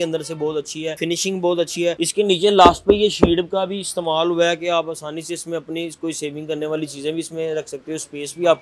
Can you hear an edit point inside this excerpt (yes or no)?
yes